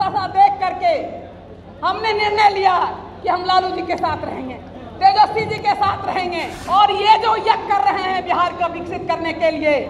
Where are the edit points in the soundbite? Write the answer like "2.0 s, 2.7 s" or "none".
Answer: 6.5 s